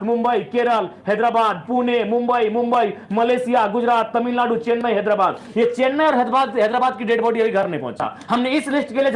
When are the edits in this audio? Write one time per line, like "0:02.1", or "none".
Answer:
0:08.3